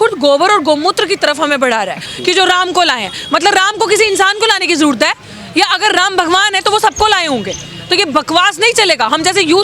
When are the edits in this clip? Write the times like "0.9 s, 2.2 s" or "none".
2.1 s